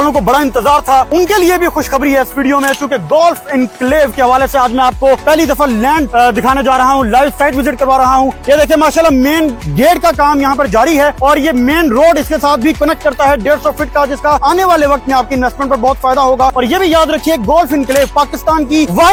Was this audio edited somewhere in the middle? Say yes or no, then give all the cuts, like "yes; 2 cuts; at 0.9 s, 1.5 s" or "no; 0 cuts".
no; 0 cuts